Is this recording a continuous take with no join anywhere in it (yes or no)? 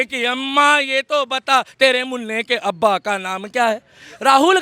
yes